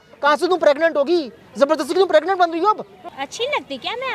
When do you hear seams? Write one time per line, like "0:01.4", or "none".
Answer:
0:03.0